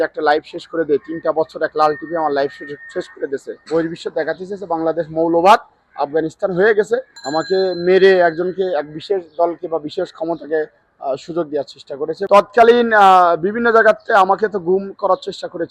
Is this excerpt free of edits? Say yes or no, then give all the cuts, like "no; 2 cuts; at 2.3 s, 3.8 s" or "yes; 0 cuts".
no; 3 cuts; at 3.5 s, 7.1 s, 12.2 s